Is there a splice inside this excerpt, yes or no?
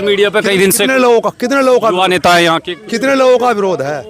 no